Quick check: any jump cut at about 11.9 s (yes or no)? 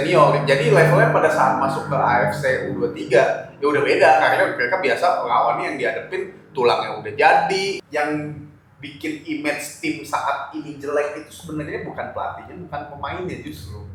no